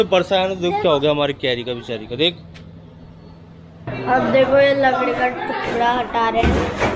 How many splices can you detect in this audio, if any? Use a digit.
1